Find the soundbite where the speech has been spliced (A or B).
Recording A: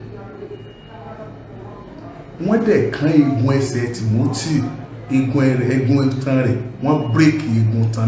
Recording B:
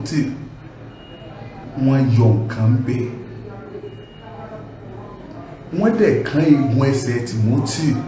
B